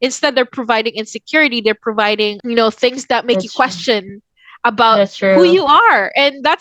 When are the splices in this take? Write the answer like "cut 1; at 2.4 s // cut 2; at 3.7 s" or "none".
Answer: none